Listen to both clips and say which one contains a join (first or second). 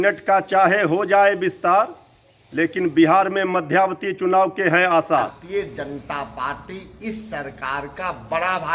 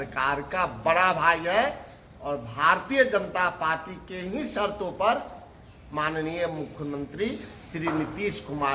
first